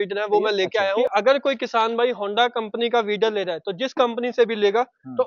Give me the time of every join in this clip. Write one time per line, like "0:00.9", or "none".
0:01.1